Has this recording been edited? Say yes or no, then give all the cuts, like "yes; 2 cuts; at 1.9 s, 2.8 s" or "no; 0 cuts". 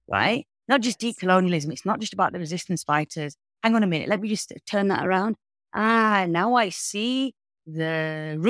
no; 0 cuts